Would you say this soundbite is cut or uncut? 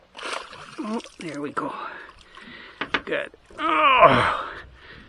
uncut